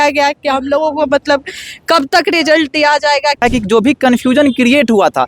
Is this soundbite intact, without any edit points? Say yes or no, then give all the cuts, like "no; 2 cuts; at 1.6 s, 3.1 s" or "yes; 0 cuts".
no; 1 cut; at 3.4 s